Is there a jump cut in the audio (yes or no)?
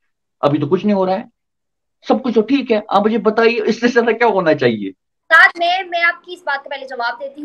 yes